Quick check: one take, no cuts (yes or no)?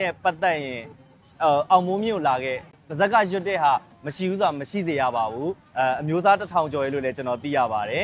no